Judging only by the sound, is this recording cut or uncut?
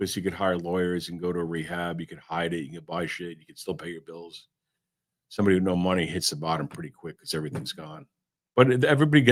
uncut